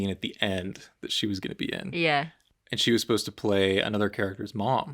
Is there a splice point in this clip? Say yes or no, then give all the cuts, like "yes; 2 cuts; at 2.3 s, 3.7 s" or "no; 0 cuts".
no; 0 cuts